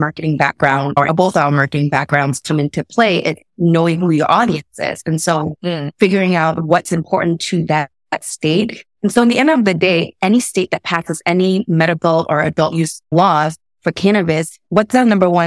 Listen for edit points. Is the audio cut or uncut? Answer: cut